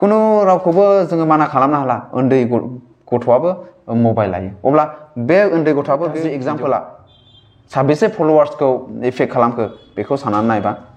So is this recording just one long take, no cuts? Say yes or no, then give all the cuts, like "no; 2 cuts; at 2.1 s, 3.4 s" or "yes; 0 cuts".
no; 1 cut; at 6.3 s